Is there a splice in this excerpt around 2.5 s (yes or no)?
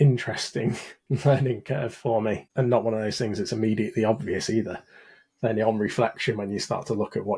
yes